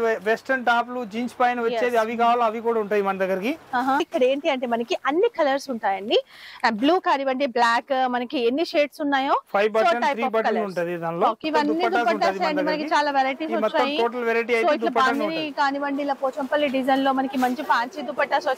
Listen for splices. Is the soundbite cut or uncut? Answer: cut